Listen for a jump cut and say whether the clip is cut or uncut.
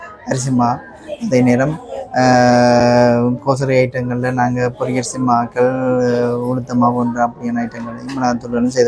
uncut